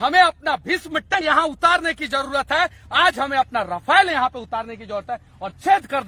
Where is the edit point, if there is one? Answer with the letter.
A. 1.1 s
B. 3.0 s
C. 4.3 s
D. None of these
A